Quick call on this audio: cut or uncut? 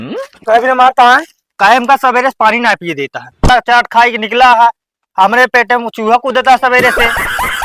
cut